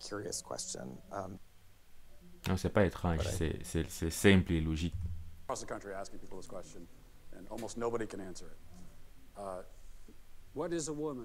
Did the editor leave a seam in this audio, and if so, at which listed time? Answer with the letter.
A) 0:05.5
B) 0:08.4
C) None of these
A